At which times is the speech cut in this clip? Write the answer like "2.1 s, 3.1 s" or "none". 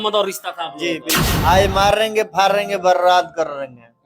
1.3 s